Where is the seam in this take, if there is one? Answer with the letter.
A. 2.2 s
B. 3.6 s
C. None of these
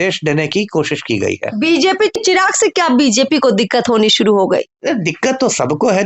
A